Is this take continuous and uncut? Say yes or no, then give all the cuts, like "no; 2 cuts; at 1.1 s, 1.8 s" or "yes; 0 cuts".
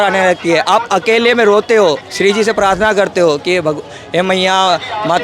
yes; 0 cuts